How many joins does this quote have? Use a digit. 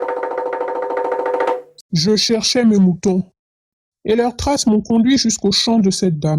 2